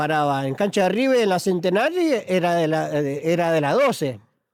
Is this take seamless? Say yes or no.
yes